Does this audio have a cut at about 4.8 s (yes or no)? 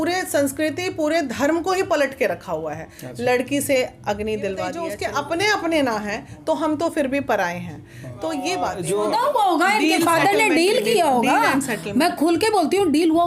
yes